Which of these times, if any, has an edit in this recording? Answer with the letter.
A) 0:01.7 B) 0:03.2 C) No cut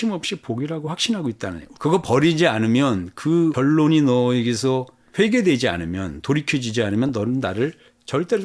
A